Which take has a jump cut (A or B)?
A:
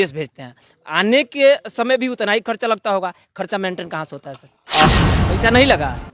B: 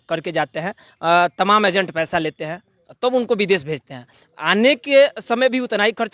A